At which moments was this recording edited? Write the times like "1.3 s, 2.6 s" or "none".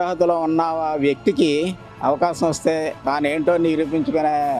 none